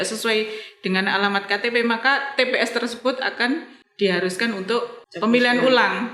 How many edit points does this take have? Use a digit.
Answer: 2